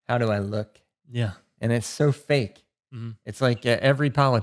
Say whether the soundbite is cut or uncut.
uncut